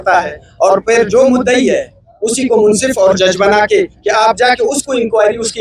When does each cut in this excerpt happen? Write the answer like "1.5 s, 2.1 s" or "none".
none